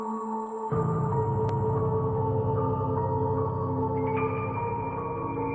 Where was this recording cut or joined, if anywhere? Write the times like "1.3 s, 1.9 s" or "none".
none